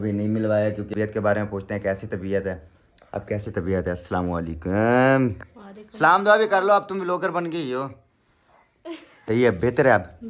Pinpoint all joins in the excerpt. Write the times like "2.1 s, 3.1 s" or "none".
0.9 s, 9.3 s